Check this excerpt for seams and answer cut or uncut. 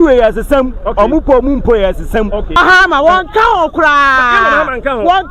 cut